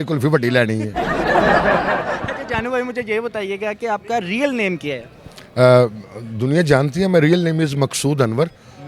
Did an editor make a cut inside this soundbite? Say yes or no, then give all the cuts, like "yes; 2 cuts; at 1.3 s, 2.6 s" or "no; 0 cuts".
no; 0 cuts